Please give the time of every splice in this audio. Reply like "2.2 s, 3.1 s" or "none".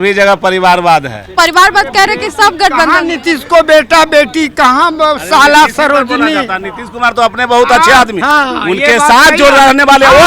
1.2 s, 8.2 s